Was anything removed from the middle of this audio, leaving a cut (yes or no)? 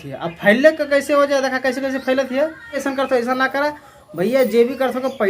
yes